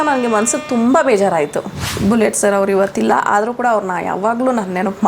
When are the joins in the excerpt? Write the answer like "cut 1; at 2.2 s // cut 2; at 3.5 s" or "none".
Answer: cut 1; at 1.8 s